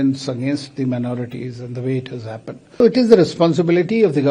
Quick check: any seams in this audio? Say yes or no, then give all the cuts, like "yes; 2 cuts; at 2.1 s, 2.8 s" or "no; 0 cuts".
yes; 1 cut; at 2.8 s